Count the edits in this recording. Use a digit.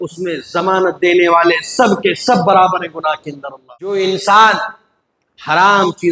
1